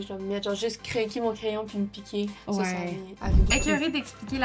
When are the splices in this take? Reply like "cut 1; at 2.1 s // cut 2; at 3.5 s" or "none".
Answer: cut 1; at 3.5 s